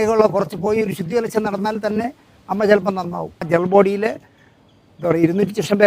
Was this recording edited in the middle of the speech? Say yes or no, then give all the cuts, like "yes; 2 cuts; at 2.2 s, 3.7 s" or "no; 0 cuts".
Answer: yes; 1 cut; at 3.5 s